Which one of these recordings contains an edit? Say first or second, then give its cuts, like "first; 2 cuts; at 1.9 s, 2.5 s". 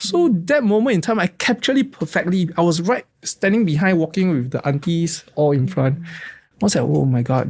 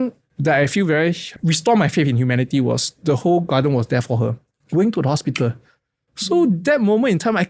second; 1 cut; at 1.3 s